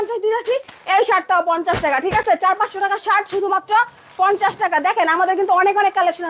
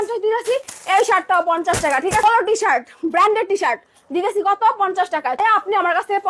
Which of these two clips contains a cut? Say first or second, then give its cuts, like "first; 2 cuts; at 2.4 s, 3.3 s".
second; 2 cuts; at 2.2 s, 5.4 s